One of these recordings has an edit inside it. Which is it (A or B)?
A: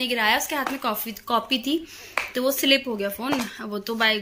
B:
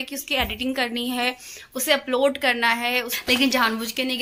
B